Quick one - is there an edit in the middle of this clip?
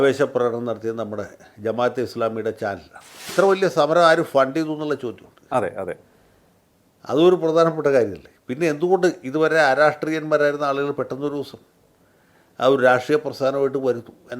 yes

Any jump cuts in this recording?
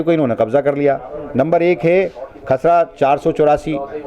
no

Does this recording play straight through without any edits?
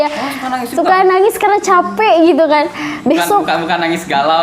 yes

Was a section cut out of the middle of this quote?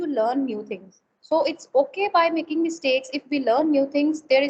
no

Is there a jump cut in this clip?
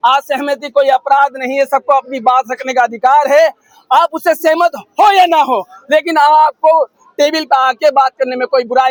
no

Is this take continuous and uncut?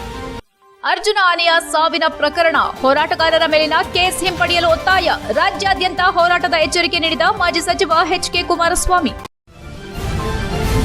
no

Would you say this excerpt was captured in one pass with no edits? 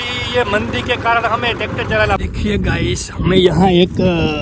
no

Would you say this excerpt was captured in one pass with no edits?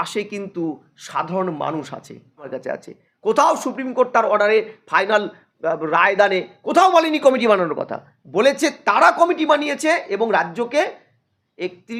no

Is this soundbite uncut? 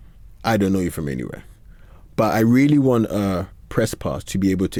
yes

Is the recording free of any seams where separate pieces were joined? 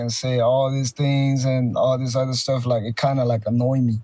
yes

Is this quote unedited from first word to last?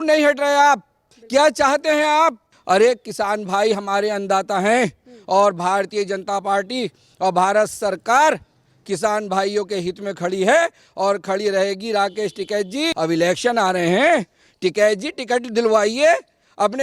no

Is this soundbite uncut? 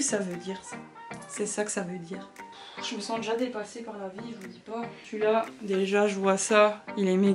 no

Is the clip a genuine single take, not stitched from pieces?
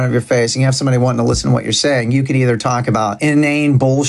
no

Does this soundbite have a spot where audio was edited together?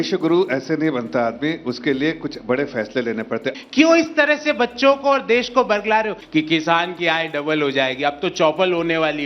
yes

